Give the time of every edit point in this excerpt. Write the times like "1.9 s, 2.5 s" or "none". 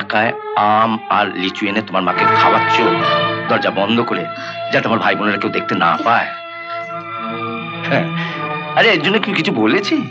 none